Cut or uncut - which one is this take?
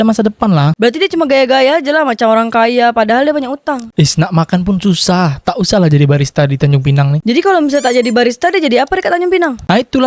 uncut